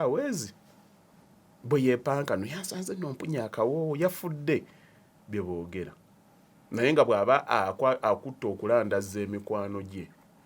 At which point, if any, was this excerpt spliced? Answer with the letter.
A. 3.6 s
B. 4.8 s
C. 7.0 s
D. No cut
D